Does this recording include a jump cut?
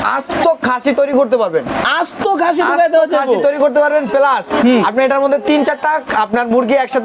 no; 0 cuts

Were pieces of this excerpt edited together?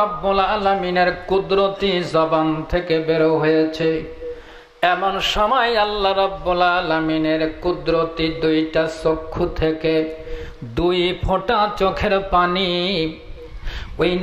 no; 0 cuts

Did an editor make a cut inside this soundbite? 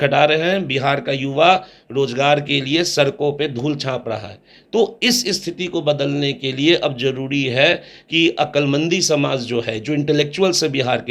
no; 0 cuts

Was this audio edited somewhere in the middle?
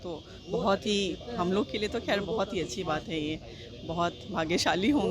no; 0 cuts

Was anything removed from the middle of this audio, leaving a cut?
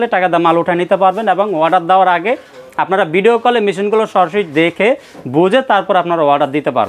no; 0 cuts

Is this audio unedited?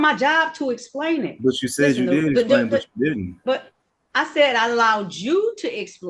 yes; 0 cuts

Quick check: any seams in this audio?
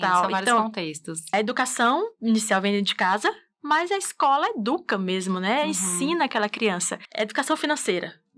yes; 2 cuts; at 1.3 s, 7.0 s

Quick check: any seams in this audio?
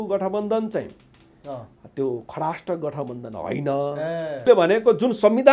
yes; 1 cut; at 4.4 s

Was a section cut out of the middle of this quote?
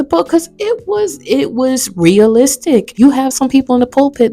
yes; 1 cut; at 2.9 s

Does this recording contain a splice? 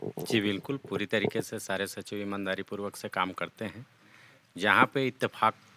no; 0 cuts

